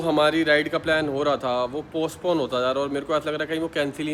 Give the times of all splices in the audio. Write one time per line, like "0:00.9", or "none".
none